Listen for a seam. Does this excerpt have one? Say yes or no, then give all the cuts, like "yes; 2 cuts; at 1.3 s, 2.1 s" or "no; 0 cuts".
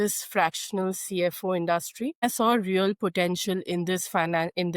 yes; 1 cut; at 2.2 s